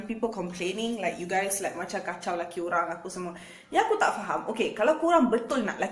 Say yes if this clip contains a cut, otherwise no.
yes